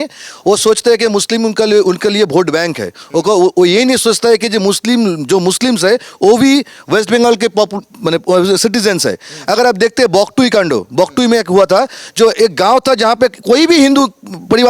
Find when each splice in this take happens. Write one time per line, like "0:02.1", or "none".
none